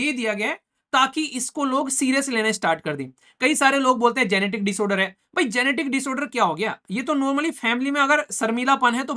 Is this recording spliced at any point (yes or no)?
no